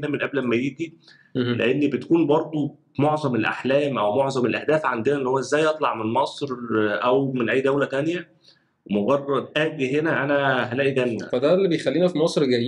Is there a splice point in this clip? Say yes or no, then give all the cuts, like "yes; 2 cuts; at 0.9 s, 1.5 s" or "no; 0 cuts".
yes; 2 cuts; at 9.5 s, 11.2 s